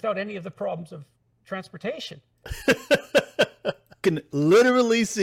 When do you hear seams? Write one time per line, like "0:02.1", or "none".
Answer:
0:04.0